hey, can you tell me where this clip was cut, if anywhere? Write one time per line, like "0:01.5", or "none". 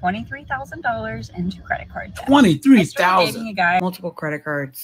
0:03.8